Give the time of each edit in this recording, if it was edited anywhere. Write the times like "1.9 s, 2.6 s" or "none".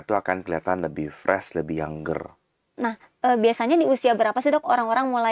2.6 s